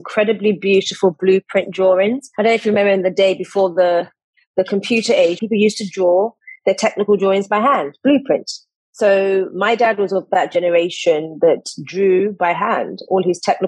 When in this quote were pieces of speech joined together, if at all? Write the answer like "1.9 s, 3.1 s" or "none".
5.4 s